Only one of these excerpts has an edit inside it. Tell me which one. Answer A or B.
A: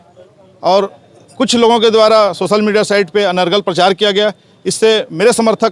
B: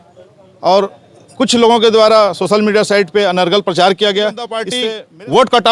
B